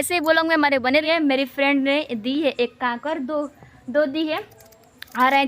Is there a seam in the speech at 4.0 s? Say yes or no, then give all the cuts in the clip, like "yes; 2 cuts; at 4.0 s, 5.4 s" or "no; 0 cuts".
no; 1 cut; at 1.0 s